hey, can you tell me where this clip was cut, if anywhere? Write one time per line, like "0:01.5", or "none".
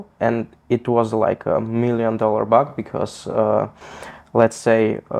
none